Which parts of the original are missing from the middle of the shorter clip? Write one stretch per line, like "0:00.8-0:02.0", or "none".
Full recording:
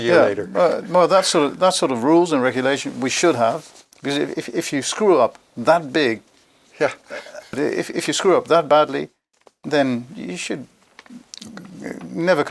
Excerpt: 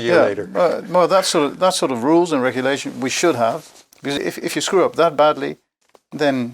0:04.2-0:07.7